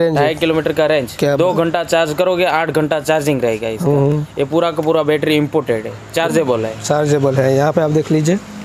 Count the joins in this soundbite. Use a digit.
0